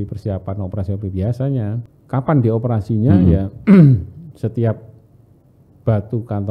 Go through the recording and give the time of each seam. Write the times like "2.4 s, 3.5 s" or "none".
1.9 s